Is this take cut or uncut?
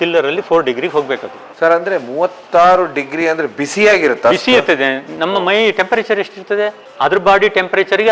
cut